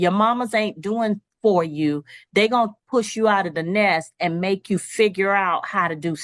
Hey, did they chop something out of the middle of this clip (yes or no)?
no